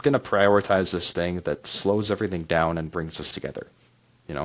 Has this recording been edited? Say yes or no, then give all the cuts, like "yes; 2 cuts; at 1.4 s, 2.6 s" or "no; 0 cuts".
no; 0 cuts